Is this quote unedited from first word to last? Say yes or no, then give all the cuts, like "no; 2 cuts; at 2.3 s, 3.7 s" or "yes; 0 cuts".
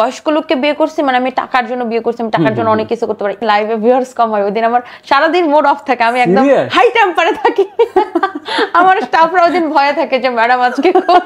no; 1 cut; at 3.4 s